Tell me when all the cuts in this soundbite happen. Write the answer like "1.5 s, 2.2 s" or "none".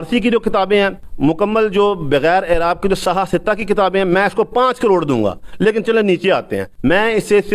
1.0 s, 6.6 s